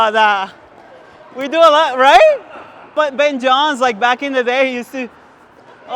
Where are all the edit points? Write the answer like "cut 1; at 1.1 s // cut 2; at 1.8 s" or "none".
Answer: none